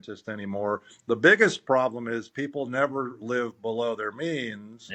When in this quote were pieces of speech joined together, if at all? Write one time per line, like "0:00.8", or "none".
none